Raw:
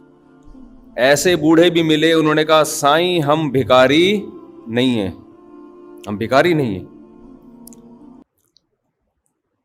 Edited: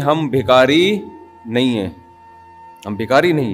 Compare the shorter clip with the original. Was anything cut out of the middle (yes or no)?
no